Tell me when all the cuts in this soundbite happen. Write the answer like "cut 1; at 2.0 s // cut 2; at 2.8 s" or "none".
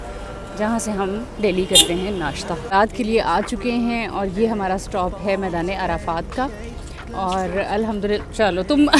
cut 1; at 2.7 s